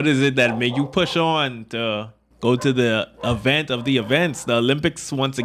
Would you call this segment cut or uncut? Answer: uncut